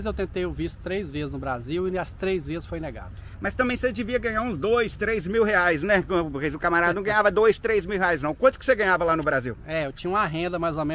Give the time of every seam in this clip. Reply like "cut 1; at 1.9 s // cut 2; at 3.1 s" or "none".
none